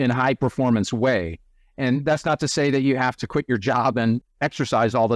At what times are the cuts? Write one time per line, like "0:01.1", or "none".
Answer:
0:04.2